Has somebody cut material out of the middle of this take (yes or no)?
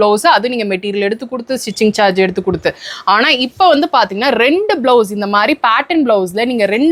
no